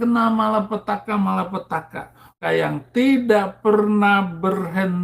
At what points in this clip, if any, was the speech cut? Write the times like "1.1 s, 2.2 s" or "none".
2.4 s